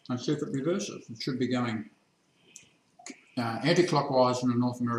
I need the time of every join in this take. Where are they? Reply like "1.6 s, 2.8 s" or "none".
3.2 s